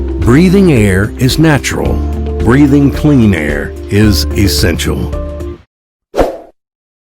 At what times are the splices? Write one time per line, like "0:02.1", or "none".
0:05.5